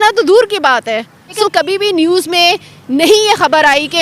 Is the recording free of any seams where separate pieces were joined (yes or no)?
no